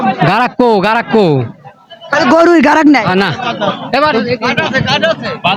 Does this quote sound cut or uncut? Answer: uncut